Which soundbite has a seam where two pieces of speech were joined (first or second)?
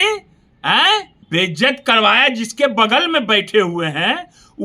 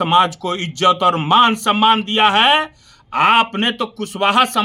first